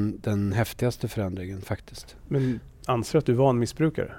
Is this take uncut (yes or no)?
yes